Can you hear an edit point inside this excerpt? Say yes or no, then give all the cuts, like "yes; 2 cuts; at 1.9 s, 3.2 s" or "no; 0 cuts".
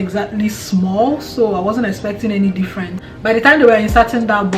yes; 1 cut; at 3.2 s